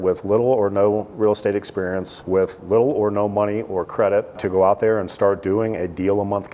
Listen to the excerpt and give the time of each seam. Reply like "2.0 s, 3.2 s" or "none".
2.1 s, 4.4 s